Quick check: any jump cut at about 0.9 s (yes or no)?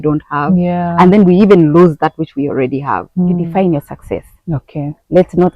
no